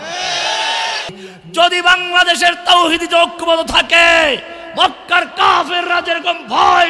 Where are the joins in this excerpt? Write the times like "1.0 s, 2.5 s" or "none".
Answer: 1.2 s